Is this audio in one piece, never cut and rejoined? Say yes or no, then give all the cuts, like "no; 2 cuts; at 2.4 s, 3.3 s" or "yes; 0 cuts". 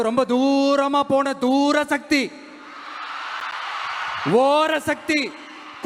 yes; 0 cuts